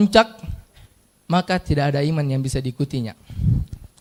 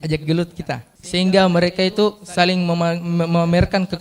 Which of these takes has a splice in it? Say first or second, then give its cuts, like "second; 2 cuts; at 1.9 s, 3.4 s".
second; 1 cut; at 0.9 s